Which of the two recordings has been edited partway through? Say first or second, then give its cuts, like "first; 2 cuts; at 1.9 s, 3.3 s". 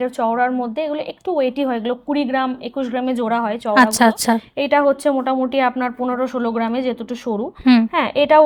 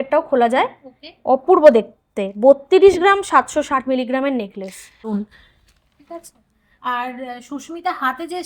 second; 1 cut; at 5.2 s